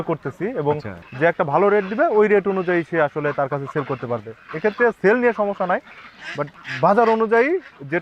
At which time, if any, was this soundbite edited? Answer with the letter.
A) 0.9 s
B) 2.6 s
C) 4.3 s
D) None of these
A